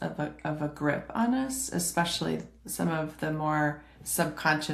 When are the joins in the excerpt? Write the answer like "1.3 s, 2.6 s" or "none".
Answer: none